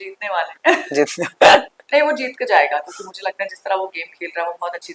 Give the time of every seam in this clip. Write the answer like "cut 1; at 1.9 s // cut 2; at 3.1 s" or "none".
cut 1; at 1.8 s